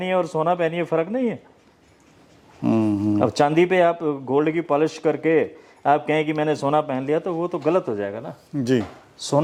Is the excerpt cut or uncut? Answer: uncut